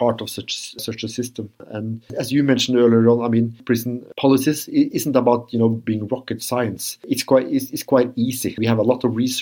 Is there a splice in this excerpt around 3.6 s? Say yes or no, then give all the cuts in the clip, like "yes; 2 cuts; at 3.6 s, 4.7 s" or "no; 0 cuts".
yes; 2 cuts; at 1.6 s, 3.6 s